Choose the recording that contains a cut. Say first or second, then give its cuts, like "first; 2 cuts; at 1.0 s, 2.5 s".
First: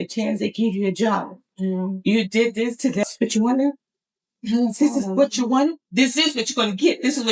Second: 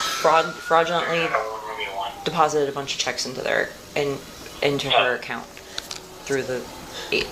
first; 1 cut; at 3.0 s